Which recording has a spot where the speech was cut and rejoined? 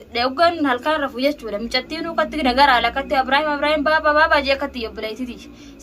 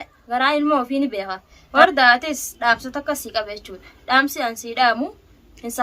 second; 1 cut; at 1.6 s

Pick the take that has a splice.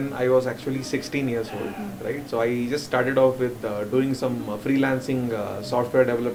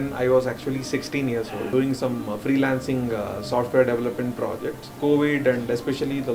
second; 2 cuts; at 1.7 s, 4.9 s

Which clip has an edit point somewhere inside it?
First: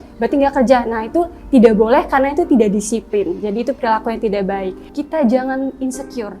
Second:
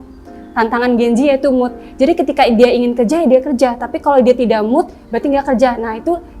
first; 1 cut; at 4.8 s

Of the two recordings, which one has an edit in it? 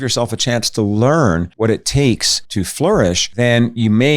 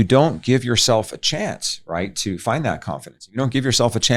first; 3 cuts; at 1.5 s, 2.4 s, 3.2 s

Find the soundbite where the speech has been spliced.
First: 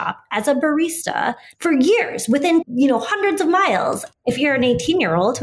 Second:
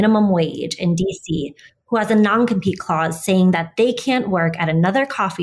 first; 3 cuts; at 1.5 s, 2.7 s, 4.0 s

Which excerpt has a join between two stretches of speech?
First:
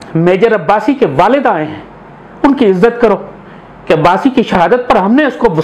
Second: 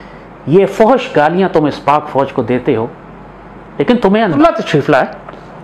second; 1 cut; at 4.4 s

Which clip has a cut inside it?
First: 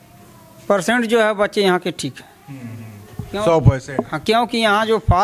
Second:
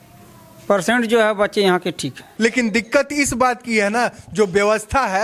second; 1 cut; at 2.3 s

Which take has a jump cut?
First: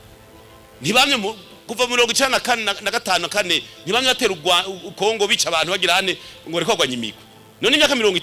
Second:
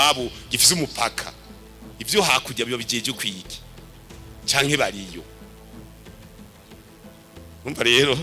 second; 2 cuts; at 5.3 s, 6.9 s

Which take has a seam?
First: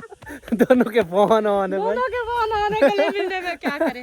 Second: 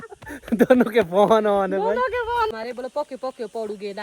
second; 1 cut; at 2.5 s

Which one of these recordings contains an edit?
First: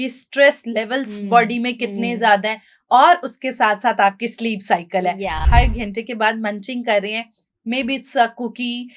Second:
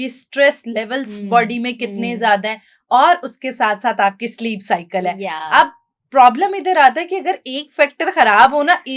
first; 1 cut; at 5.4 s

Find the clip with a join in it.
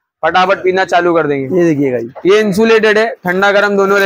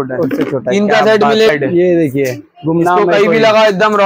second; 1 cut; at 1.5 s

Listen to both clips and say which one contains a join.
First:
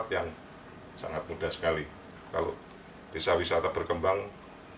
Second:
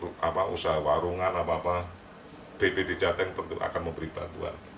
first; 1 cut; at 2.2 s

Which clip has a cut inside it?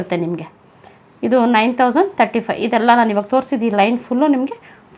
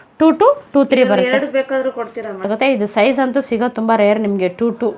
second; 1 cut; at 2.5 s

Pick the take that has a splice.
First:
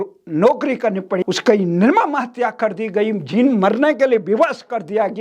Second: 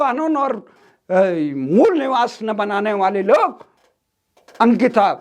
first; 1 cut; at 1.2 s

